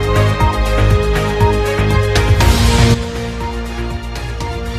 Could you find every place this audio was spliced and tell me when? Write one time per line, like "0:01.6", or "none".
0:02.3

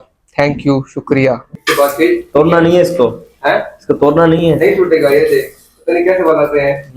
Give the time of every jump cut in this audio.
0:01.5

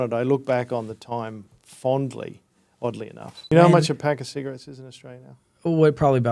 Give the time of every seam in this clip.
0:03.5

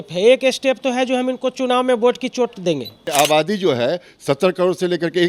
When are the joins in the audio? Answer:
0:03.1

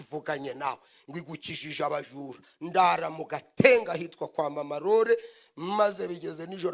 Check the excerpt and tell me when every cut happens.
none

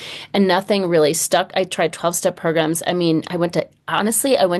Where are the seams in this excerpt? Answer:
none

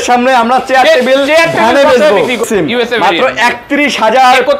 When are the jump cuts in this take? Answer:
0:02.5

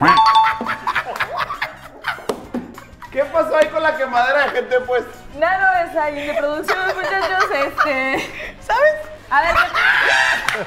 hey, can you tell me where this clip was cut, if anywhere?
none

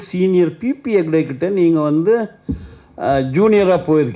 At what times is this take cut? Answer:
none

